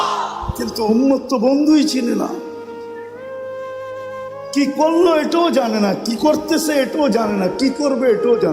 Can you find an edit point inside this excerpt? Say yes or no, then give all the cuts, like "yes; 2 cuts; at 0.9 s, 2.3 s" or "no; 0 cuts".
yes; 2 cuts; at 2.5 s, 4.3 s